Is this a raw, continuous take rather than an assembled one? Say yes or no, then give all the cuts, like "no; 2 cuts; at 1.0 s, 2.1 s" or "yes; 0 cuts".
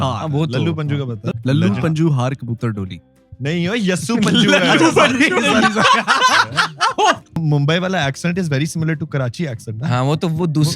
no; 2 cuts; at 1.3 s, 7.4 s